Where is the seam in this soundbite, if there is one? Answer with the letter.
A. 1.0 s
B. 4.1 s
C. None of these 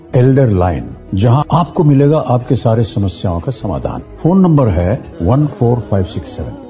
C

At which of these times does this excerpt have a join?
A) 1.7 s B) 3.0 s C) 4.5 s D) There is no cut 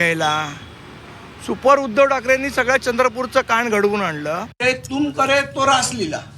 C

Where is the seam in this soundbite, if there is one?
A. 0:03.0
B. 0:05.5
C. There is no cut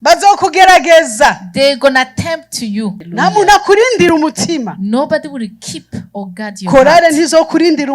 A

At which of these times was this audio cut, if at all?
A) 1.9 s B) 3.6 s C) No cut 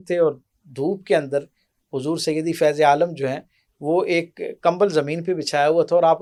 C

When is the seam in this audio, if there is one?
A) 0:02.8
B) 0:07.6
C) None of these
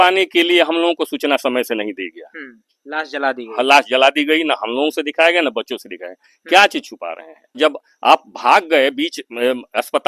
B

